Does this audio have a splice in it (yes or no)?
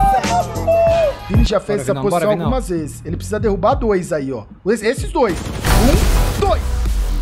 yes